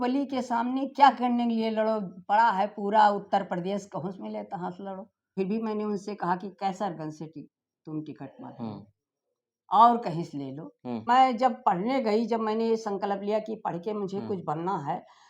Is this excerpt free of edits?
no; 2 cuts; at 5.3 s, 11.0 s

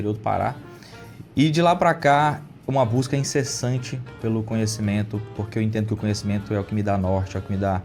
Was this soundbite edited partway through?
no; 0 cuts

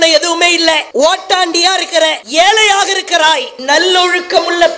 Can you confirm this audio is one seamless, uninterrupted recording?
no; 3 cuts; at 0.9 s, 2.2 s, 3.5 s

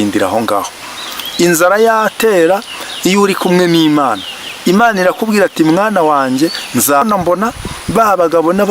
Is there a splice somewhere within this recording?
yes; 1 cut; at 7.0 s

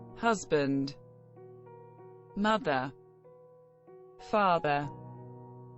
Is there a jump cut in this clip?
yes; 2 cuts; at 0.9 s, 2.3 s

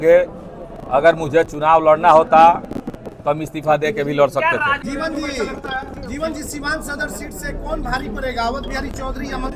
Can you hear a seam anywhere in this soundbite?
yes; 1 cut; at 4.8 s

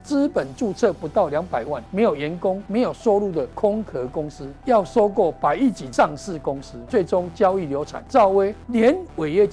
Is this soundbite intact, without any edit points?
no; 8 cuts; at 1.8 s, 2.6 s, 3.5 s, 4.5 s, 5.8 s, 6.7 s, 8.0 s, 8.6 s

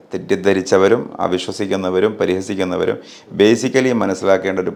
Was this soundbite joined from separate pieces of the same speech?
no; 0 cuts

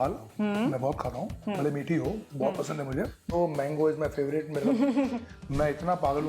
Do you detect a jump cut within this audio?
yes; 1 cut; at 3.3 s

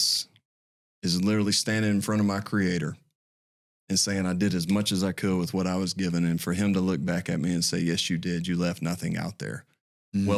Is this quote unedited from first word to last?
yes; 0 cuts

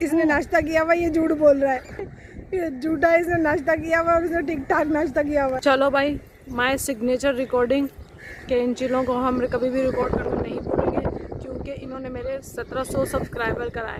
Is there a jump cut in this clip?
no; 0 cuts

